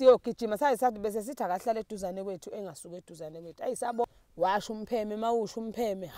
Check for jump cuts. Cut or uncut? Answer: cut